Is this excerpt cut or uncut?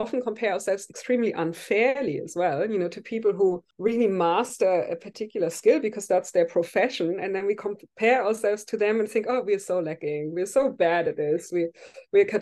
cut